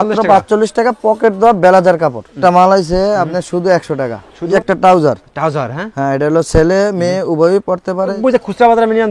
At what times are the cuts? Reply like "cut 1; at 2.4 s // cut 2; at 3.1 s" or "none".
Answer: cut 1; at 2.4 s // cut 2; at 4.5 s // cut 3; at 8.2 s

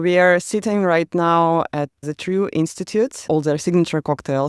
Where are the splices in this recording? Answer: cut 1; at 2.0 s // cut 2; at 3.3 s

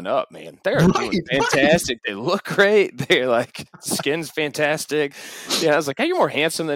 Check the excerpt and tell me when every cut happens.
none

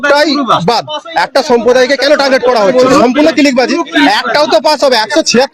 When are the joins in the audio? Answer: cut 1; at 2.9 s

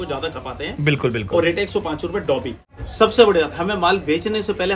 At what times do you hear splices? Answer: cut 1; at 2.7 s

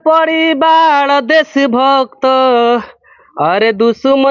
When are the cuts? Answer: none

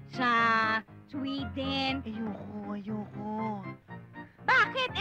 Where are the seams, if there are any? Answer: cut 1; at 2.1 s

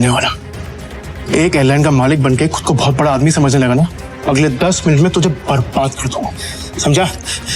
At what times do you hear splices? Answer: cut 1; at 4.1 s

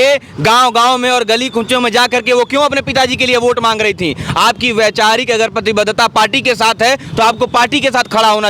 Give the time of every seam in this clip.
none

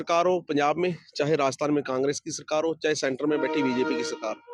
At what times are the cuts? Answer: none

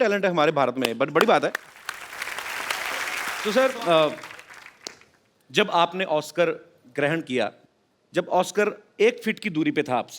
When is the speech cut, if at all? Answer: cut 1; at 3.4 s

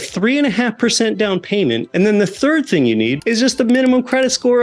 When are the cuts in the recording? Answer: cut 1; at 1.9 s // cut 2; at 3.2 s

